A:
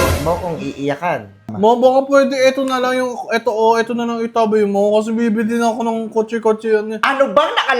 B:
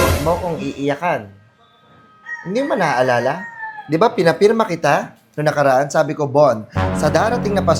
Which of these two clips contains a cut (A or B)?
A